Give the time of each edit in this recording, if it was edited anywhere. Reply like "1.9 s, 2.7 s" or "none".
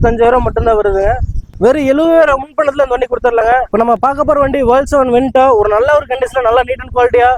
1.4 s, 3.7 s